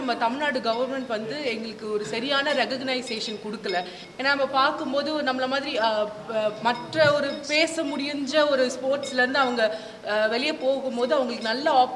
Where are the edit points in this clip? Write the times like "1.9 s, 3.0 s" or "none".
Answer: 4.0 s